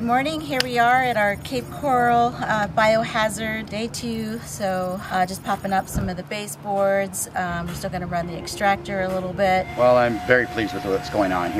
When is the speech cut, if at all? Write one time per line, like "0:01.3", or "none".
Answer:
0:03.7
0:05.0
0:09.7

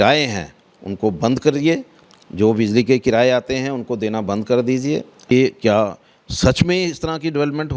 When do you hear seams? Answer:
0:05.3

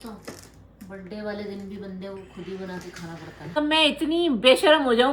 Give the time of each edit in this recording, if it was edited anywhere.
0:03.5

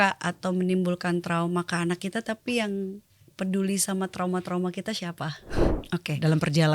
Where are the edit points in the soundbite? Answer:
0:05.6

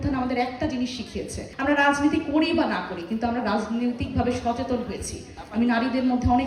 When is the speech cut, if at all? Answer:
0:01.4
0:05.3

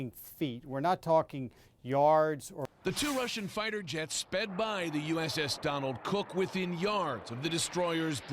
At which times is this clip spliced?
0:02.6

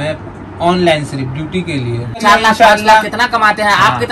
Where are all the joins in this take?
0:02.2

